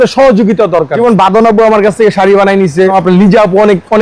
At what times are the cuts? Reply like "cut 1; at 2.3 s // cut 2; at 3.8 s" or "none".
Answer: cut 1; at 1.0 s // cut 2; at 2.9 s